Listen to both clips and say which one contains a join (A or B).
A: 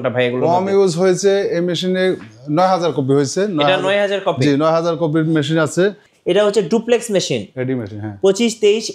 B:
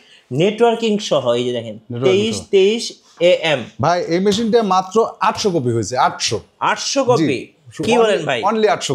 A